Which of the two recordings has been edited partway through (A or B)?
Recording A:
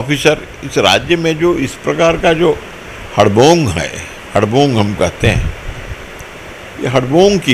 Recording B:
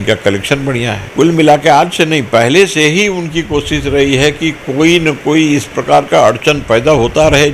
B